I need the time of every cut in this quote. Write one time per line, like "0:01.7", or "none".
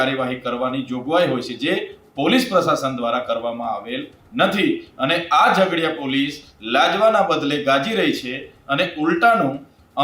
none